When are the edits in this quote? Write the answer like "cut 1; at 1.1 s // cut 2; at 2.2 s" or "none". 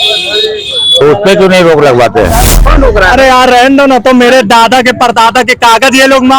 cut 1; at 2.5 s